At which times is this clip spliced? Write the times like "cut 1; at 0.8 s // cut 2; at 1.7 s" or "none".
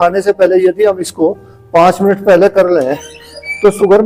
none